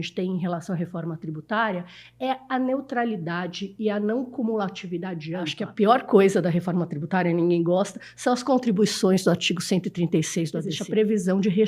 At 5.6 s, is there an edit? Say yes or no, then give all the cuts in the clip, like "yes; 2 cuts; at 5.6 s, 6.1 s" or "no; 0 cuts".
yes; 2 cuts; at 5.6 s, 10.7 s